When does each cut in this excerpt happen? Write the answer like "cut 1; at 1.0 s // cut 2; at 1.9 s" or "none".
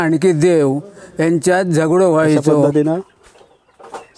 cut 1; at 2.7 s